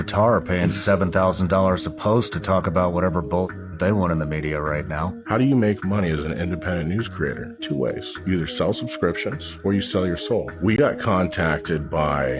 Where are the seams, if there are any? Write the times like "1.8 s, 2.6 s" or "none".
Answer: none